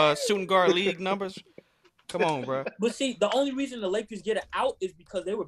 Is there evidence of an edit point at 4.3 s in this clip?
no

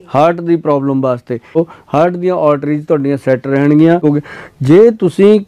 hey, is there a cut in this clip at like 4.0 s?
yes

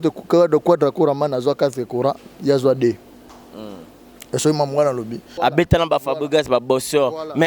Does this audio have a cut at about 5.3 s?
yes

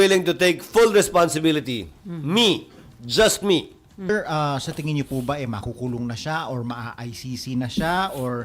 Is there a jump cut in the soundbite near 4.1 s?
yes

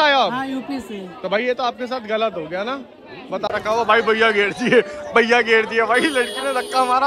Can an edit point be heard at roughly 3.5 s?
yes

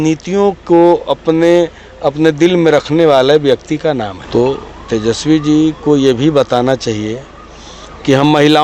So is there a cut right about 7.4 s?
no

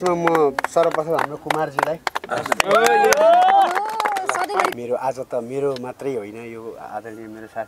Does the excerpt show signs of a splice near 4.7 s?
yes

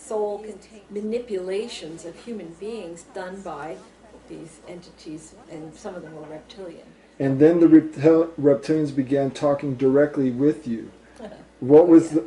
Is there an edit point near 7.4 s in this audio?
no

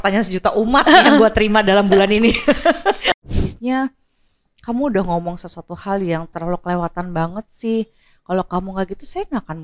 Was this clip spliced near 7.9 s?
no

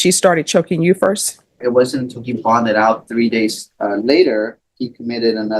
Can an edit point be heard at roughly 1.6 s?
yes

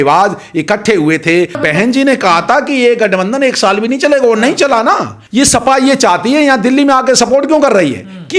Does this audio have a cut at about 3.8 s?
no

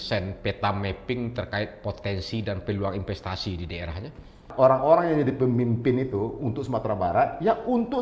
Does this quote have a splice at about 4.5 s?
yes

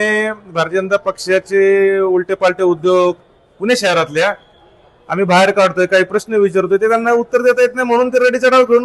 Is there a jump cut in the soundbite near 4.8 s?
no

